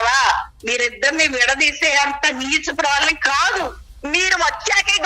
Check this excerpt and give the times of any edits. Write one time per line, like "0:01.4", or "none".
0:03.8